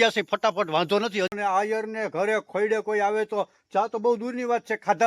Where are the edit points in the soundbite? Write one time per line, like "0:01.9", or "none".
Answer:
0:01.3